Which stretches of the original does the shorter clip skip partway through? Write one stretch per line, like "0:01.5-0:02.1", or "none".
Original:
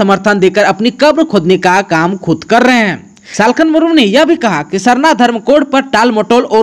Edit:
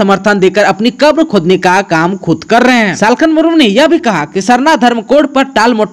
0:02.9-0:03.3